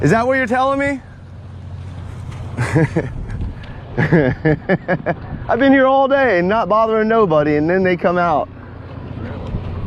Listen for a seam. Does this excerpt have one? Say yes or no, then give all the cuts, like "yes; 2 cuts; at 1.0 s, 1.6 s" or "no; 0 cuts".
no; 0 cuts